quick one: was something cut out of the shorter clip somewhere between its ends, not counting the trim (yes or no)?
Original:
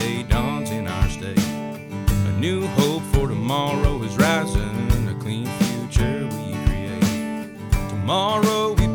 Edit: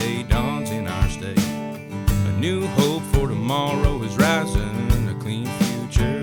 no